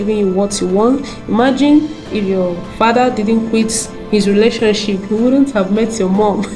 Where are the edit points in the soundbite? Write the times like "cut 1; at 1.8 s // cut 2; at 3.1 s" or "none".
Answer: none